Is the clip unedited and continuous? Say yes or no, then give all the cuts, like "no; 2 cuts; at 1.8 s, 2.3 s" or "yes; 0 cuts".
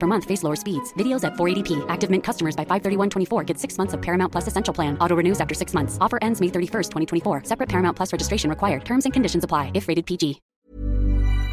no; 1 cut; at 10.5 s